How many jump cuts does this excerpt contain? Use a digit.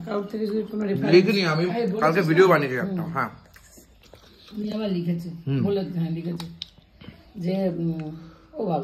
0